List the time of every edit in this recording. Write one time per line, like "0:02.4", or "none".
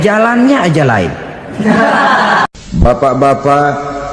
0:02.5

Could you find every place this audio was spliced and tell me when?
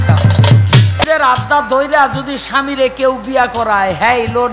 0:01.0

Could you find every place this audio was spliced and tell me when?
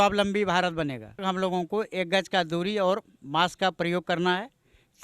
0:01.2

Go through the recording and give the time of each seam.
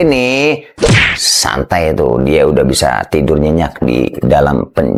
none

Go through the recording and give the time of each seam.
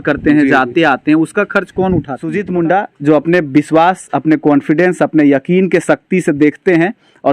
0:02.4

